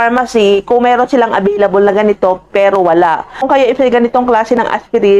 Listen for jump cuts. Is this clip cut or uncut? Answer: cut